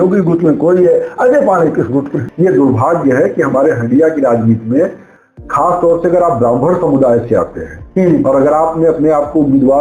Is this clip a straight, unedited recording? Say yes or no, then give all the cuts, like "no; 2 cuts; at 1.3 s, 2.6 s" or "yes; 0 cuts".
no; 1 cut; at 2.2 s